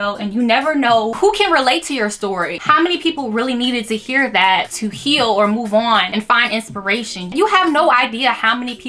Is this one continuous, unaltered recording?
yes; 0 cuts

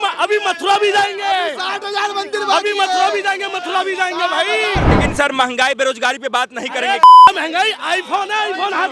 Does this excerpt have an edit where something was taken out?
yes; 1 cut; at 4.9 s

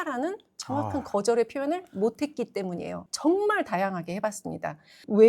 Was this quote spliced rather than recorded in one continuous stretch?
yes; 1 cut; at 3.1 s

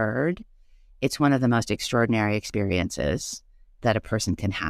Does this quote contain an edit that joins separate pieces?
yes; 1 cut; at 3.8 s

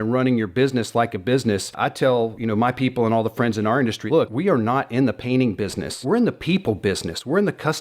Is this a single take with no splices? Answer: no; 3 cuts; at 2.1 s, 4.1 s, 5.9 s

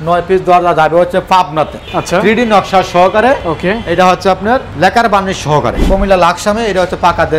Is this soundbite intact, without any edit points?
no; 3 cuts; at 1.9 s, 4.7 s, 5.8 s

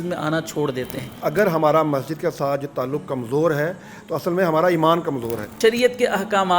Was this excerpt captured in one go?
no; 2 cuts; at 1.0 s, 5.5 s

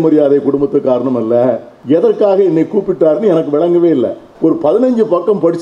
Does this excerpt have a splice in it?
yes; 2 cuts; at 1.7 s, 4.2 s

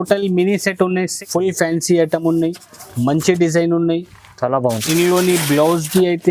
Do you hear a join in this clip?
yes; 1 cut; at 1.2 s

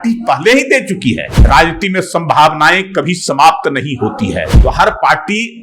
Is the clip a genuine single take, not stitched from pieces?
no; 2 cuts; at 1.3 s, 4.5 s

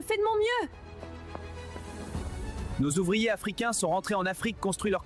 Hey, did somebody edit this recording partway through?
yes; 1 cut; at 3.4 s

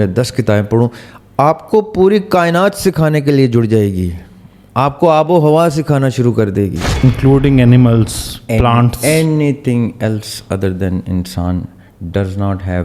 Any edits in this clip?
yes; 1 cut; at 7.0 s

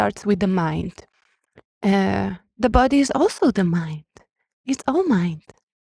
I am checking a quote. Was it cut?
no; 0 cuts

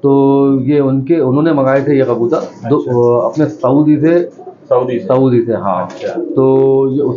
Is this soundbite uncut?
yes; 0 cuts

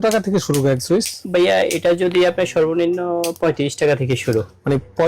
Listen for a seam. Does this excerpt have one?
no; 0 cuts

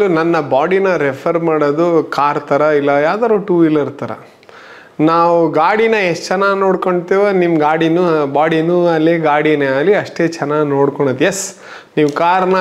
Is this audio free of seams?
yes; 0 cuts

